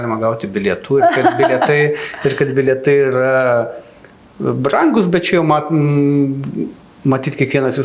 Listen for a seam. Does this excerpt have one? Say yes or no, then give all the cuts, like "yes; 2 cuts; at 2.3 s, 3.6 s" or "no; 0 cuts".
no; 0 cuts